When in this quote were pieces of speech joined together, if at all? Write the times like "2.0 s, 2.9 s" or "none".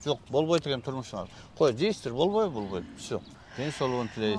3.4 s